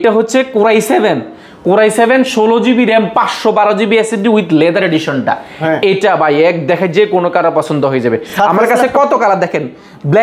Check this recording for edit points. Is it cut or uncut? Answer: uncut